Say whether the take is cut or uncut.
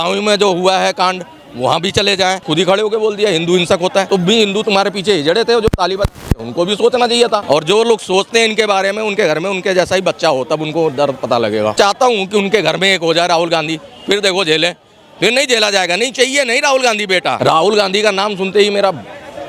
cut